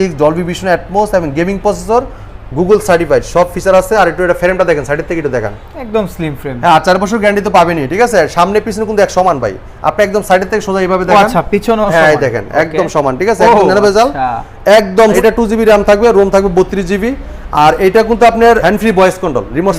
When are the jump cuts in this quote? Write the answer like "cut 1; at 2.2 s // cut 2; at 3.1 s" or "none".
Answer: cut 1; at 15.2 s // cut 2; at 18.6 s